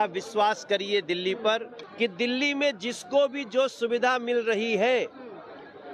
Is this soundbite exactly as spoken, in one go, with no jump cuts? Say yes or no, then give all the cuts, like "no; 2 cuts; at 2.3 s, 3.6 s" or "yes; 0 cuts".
no; 1 cut; at 1.8 s